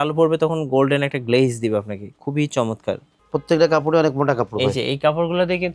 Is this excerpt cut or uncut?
cut